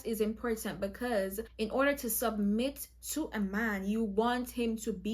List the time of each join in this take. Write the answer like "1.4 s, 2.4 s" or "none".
1.4 s